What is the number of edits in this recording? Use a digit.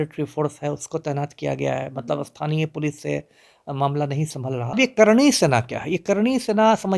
1